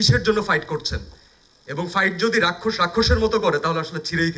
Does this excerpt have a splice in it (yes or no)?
no